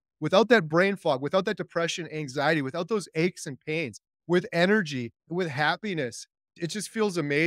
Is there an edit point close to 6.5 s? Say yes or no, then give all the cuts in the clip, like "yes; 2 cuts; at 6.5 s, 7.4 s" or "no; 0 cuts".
yes; 2 cuts; at 5.3 s, 6.5 s